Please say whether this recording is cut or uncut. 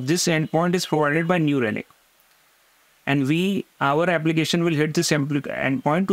uncut